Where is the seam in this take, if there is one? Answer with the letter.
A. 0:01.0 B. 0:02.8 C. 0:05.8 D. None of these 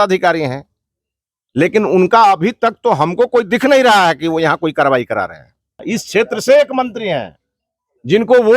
C